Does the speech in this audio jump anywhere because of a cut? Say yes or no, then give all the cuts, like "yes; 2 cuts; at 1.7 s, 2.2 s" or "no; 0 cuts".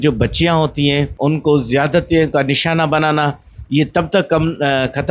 yes; 1 cut; at 1.1 s